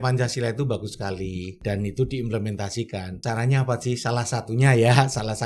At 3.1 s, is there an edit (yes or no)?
yes